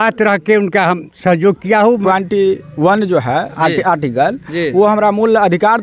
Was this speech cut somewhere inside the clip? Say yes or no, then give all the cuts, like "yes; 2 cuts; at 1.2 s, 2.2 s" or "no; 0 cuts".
yes; 1 cut; at 2.0 s